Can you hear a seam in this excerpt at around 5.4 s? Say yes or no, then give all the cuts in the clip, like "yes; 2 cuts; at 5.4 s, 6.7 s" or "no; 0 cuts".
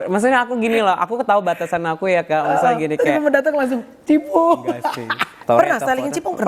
yes; 1 cut; at 5.4 s